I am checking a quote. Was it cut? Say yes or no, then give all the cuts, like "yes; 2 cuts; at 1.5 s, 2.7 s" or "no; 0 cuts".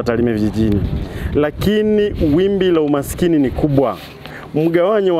no; 0 cuts